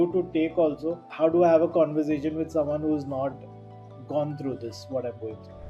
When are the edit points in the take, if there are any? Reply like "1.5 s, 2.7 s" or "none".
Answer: 1.0 s